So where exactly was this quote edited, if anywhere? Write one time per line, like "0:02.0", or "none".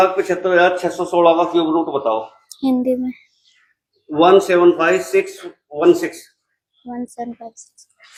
none